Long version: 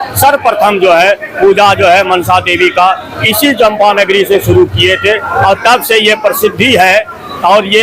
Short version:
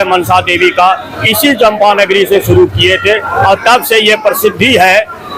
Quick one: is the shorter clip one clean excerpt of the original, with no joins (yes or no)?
yes